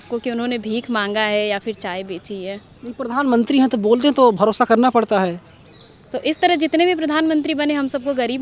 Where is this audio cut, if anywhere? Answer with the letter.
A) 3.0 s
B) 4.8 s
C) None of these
C